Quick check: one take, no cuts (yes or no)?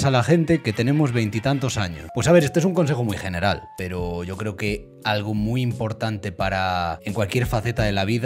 no